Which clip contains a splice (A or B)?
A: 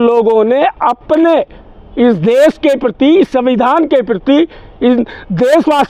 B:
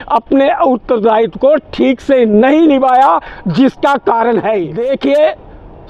B